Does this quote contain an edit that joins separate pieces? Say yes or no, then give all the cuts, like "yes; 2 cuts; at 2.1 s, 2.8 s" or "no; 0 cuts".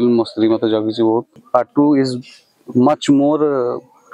yes; 1 cut; at 1.4 s